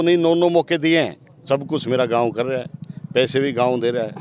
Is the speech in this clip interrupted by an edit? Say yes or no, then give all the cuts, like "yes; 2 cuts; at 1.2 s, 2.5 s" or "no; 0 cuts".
yes; 1 cut; at 1.3 s